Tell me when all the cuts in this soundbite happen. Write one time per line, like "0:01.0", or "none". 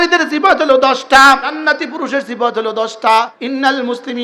0:01.6
0:03.4